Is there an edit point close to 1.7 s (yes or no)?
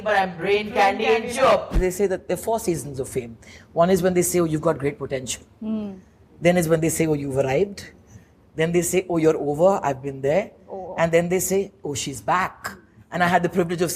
yes